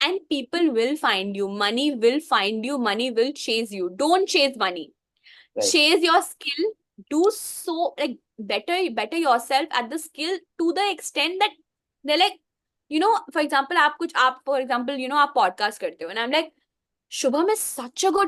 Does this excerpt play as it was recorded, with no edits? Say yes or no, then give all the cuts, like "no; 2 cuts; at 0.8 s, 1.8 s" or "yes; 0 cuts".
yes; 0 cuts